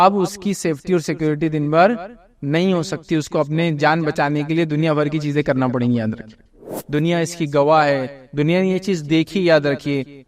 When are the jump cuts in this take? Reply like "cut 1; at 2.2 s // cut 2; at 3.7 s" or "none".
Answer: cut 1; at 6.6 s